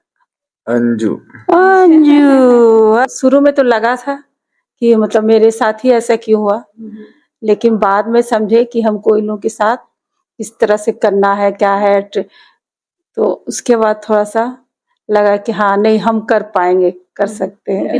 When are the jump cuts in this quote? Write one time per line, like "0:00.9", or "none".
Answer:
0:03.0